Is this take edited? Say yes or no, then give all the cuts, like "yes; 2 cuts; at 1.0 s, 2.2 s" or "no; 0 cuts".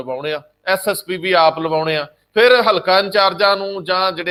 no; 0 cuts